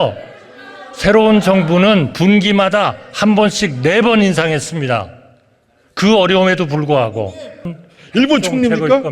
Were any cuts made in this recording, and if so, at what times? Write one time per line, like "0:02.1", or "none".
0:07.7